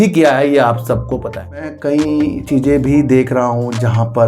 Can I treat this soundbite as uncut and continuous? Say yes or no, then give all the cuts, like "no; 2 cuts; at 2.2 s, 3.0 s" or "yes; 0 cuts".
no; 1 cut; at 1.7 s